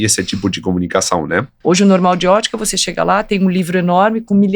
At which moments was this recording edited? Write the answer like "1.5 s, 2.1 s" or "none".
1.5 s